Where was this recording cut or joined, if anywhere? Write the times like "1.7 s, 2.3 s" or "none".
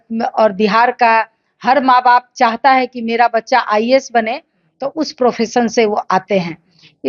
none

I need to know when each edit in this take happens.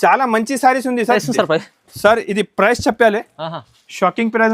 1.2 s

